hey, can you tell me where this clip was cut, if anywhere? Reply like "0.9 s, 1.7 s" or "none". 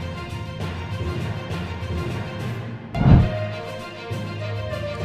none

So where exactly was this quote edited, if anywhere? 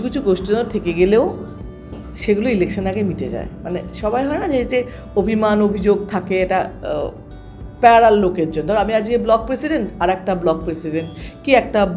none

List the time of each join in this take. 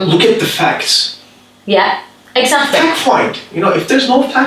none

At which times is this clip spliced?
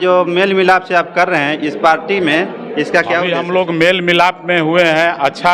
3.4 s

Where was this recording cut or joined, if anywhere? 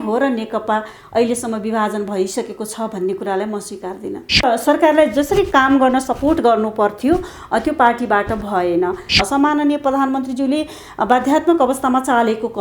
4.4 s, 9.1 s

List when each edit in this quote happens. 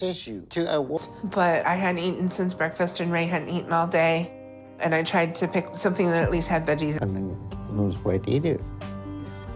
1.0 s, 7.0 s

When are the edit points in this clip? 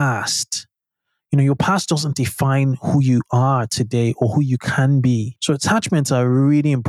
5.3 s

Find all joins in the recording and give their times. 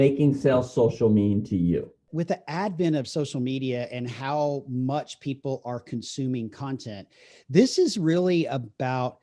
2.0 s

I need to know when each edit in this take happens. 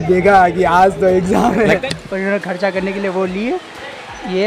1.8 s

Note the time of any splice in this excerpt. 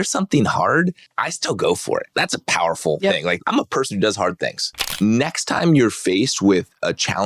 1.1 s, 2.1 s, 3.4 s, 4.9 s

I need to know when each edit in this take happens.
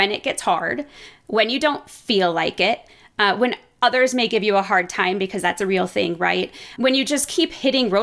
none

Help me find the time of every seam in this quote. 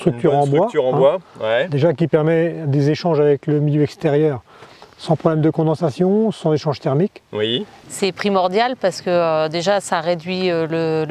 7.8 s

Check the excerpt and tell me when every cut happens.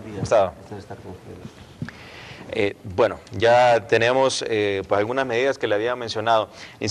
5.6 s

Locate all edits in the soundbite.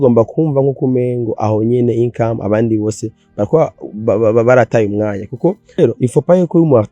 5.8 s

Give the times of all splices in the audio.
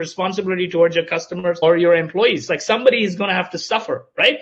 1.6 s

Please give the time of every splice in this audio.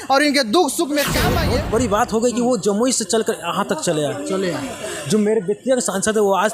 1.3 s

